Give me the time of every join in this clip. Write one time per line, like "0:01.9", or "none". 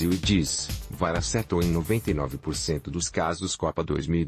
none